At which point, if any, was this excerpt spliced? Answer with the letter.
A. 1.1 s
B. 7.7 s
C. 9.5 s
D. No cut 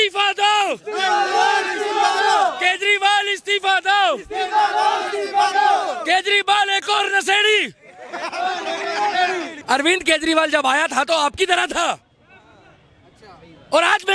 C